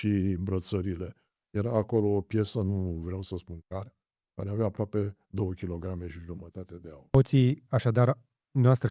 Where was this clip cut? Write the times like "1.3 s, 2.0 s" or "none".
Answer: 7.1 s